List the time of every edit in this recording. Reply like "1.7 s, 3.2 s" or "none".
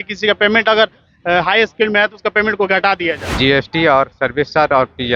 3.3 s